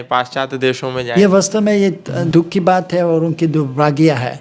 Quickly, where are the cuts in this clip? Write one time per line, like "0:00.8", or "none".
0:01.1
0:02.1